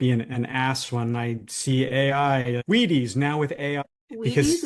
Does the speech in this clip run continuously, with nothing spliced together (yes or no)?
no